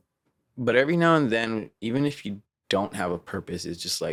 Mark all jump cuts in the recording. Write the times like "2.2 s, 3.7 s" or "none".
none